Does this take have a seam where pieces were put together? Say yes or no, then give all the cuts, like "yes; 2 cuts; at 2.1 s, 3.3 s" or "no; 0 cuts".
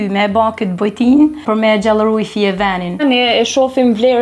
yes; 2 cuts; at 1.4 s, 3.0 s